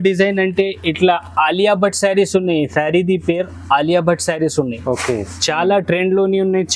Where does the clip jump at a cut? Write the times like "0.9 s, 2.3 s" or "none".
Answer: none

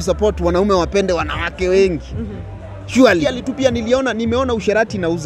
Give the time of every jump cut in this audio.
3.3 s

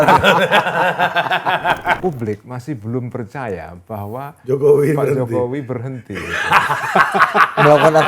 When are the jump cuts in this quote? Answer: 2.0 s

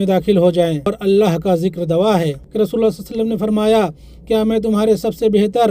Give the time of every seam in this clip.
1.0 s, 2.4 s

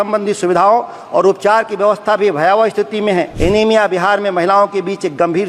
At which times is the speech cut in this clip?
3.3 s

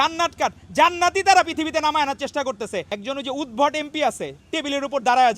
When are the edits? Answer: 2.9 s

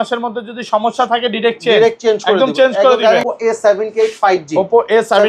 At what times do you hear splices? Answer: 3.3 s

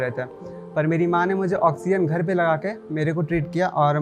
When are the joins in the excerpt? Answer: none

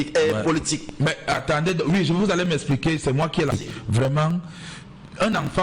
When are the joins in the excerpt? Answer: 3.5 s

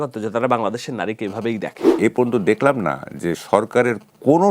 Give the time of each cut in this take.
1.8 s

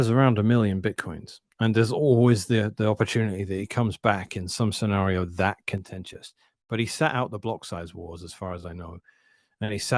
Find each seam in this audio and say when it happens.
none

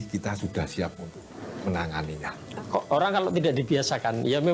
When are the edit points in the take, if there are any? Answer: 2.3 s

